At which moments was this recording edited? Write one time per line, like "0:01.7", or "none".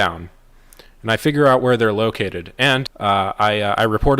0:02.9